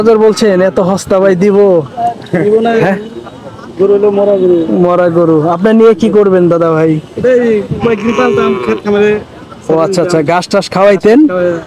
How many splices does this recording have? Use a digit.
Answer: 0